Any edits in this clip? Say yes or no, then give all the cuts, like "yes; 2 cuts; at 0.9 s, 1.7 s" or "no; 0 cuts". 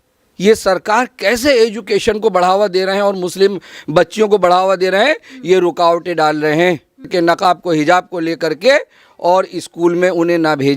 yes; 1 cut; at 7.1 s